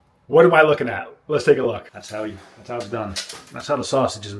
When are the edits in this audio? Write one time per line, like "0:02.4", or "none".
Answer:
0:02.0